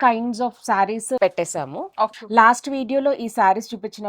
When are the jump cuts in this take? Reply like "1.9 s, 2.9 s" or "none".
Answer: 1.2 s, 2.1 s